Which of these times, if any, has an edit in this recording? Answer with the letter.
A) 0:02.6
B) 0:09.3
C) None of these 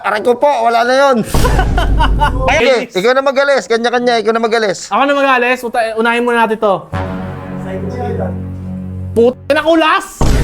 A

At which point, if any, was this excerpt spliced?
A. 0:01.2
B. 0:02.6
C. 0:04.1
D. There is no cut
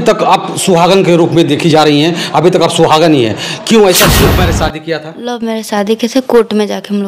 C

